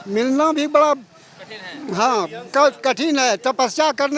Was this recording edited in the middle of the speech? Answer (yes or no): no